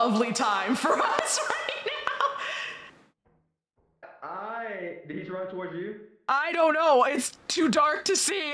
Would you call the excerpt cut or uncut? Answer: uncut